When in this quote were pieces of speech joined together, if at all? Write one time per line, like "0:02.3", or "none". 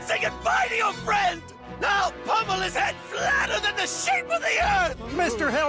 none